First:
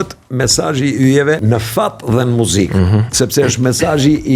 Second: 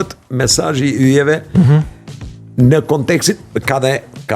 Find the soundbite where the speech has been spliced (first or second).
first